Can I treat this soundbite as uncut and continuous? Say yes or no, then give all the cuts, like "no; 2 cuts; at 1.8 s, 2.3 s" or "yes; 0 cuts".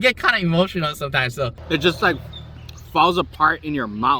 no; 1 cut; at 1.6 s